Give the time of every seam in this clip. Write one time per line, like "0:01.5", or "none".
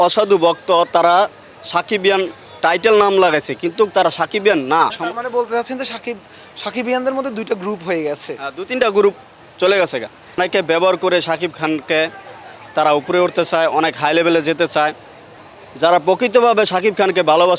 0:05.0
0:10.4
0:15.3